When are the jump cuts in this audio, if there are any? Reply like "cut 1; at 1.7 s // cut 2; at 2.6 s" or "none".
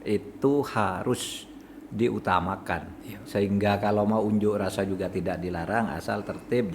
cut 1; at 3.0 s